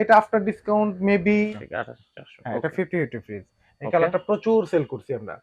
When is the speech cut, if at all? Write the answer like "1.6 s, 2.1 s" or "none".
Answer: 1.5 s

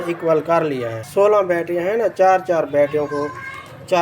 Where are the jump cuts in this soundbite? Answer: 1.0 s

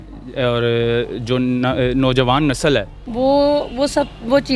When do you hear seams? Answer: 3.0 s

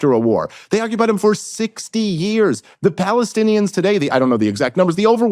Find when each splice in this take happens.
none

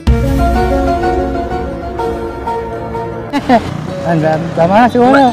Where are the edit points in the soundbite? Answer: 3.7 s

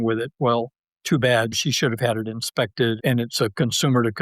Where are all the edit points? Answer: 1.5 s, 3.0 s

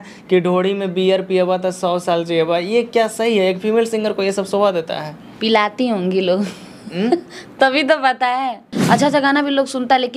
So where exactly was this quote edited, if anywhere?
8.7 s

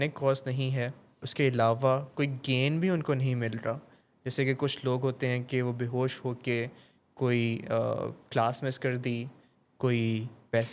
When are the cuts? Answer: 1.2 s

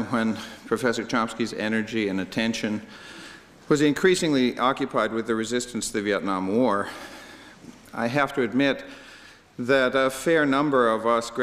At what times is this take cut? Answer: 10.4 s

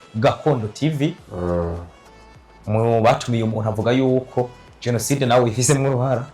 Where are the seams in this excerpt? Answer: none

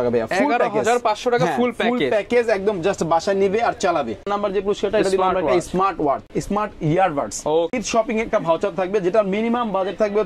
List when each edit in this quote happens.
4.3 s, 6.3 s, 7.8 s

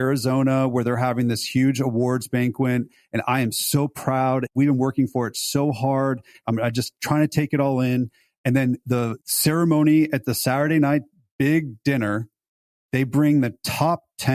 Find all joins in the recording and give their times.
4.5 s, 6.4 s, 8.9 s

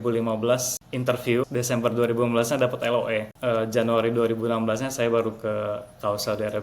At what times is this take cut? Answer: 1.1 s, 3.3 s

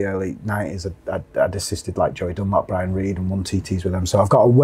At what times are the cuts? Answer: none

